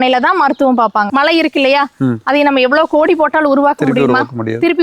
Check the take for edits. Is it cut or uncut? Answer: cut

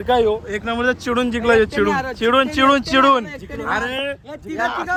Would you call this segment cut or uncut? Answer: uncut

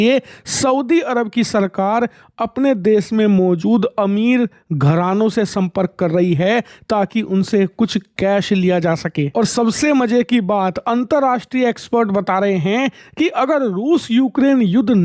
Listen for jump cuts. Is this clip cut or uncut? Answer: uncut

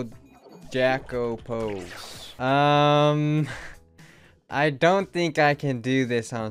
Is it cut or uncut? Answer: uncut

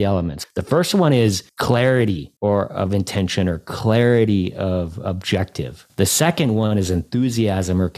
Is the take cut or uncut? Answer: cut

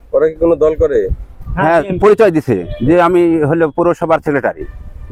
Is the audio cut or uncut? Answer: uncut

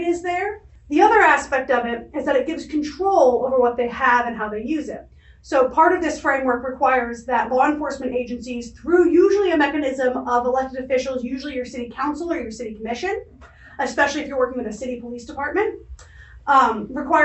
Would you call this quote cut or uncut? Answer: uncut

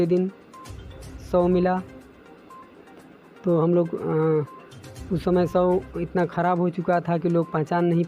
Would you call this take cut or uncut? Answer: uncut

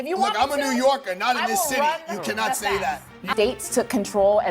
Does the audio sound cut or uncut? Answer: cut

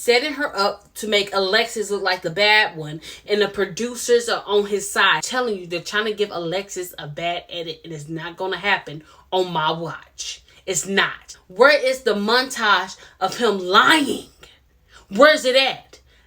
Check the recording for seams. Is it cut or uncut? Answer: cut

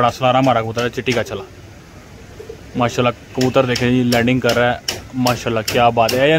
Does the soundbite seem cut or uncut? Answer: uncut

